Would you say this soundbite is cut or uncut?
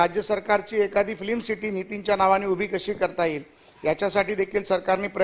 uncut